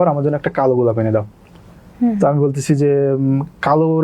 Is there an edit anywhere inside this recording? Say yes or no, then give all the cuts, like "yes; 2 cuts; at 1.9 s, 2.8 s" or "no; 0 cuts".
no; 0 cuts